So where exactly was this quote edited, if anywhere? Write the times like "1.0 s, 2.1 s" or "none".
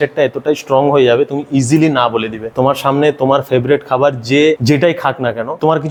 none